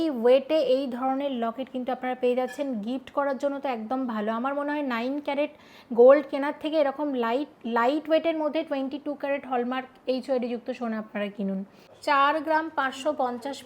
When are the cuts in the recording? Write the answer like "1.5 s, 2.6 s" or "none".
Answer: 11.8 s

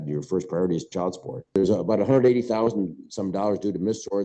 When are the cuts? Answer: 1.5 s

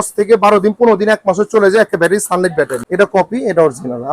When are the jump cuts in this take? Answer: 2.8 s

